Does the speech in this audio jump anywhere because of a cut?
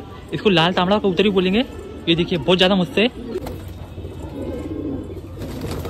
yes; 1 cut; at 3.4 s

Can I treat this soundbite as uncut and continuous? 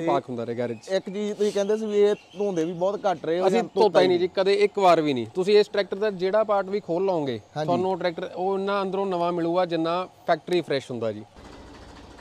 no; 1 cut; at 11.3 s

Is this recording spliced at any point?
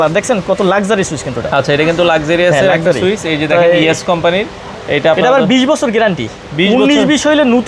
no; 0 cuts

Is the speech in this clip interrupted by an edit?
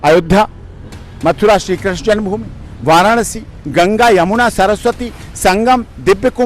no; 0 cuts

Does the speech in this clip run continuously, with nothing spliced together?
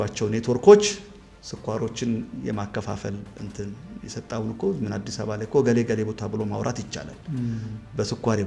yes; 0 cuts

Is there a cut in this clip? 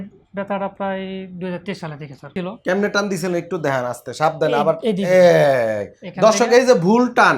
yes; 1 cut; at 2.3 s

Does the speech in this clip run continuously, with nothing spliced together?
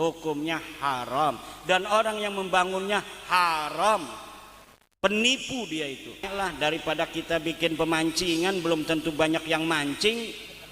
no; 1 cut; at 6.3 s

